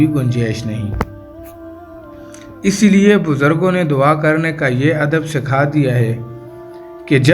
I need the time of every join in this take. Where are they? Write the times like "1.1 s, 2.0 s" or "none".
1.1 s, 2.6 s